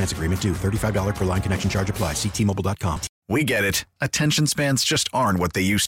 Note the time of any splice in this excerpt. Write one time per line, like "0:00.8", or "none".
0:03.1